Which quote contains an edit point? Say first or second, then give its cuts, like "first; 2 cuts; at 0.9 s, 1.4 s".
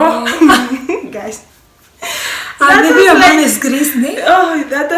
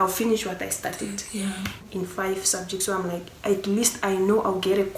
second; 1 cut; at 1.9 s